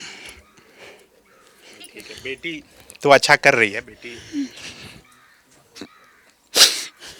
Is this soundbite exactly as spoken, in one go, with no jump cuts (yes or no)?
yes